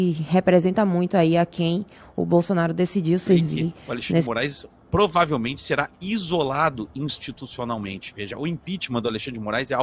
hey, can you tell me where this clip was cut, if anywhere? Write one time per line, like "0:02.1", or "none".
0:04.2